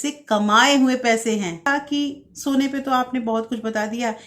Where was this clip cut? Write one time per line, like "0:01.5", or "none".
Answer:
0:01.7